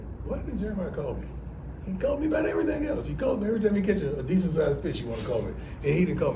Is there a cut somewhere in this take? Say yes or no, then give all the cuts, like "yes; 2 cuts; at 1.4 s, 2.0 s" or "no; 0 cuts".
no; 0 cuts